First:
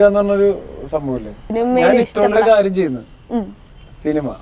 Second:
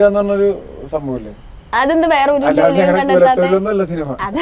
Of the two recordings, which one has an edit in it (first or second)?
first